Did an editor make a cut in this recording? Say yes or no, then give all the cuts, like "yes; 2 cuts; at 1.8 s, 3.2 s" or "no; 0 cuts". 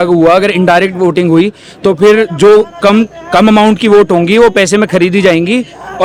no; 0 cuts